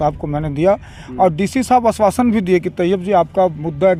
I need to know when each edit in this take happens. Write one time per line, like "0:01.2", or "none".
none